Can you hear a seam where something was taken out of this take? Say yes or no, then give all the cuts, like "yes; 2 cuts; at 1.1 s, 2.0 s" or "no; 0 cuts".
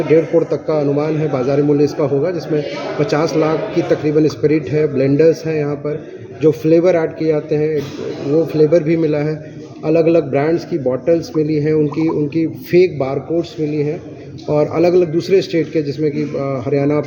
no; 0 cuts